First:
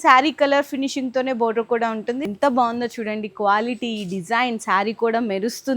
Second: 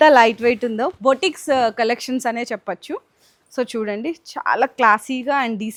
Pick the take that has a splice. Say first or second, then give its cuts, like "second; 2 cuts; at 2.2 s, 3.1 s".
first; 1 cut; at 2.2 s